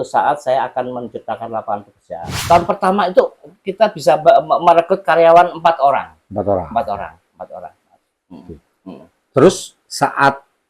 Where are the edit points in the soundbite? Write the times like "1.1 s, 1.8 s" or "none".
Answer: 2.3 s